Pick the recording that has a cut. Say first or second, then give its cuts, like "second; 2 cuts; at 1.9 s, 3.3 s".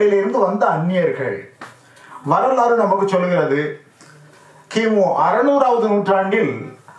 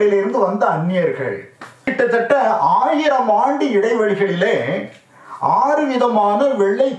second; 1 cut; at 1.9 s